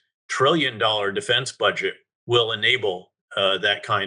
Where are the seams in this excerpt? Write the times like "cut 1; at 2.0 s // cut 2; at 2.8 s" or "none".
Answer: none